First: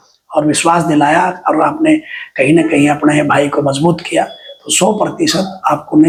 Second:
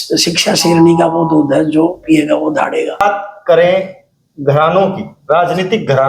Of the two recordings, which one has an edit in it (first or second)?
second